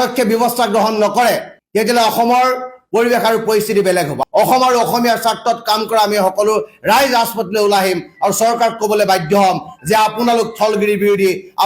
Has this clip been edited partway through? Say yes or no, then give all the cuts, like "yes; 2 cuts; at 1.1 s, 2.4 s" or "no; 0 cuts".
yes; 1 cut; at 4.2 s